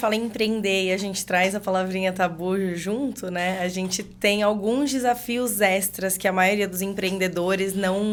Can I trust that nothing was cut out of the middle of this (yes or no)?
yes